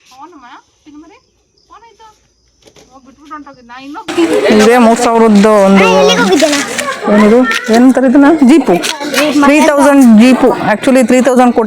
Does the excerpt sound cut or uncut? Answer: cut